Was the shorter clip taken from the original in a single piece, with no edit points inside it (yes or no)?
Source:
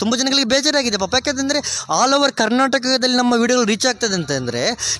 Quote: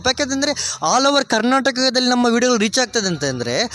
yes